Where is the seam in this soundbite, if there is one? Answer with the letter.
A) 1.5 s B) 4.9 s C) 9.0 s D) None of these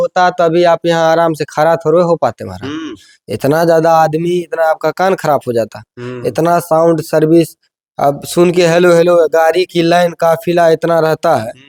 D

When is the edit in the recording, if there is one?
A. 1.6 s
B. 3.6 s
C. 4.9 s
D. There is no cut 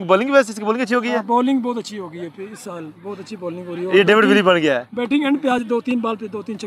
D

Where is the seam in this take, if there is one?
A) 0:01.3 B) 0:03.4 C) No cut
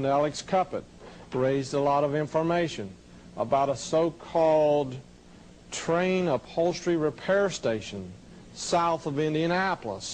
B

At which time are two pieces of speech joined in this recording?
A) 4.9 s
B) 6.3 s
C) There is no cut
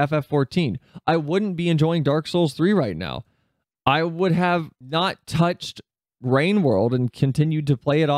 A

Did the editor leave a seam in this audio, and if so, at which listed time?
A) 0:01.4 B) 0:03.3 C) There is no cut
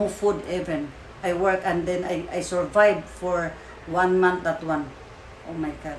C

